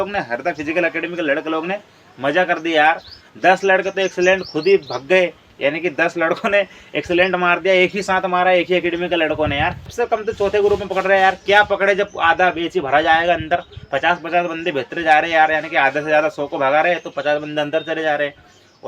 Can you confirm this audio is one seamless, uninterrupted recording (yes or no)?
no